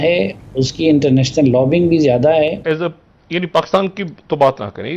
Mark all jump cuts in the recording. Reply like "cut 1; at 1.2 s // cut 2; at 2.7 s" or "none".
cut 1; at 2.6 s